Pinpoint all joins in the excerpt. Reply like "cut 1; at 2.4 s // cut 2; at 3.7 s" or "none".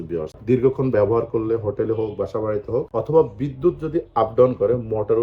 none